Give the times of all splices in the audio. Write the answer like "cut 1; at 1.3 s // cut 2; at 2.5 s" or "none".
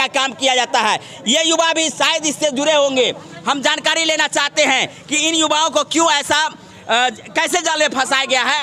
none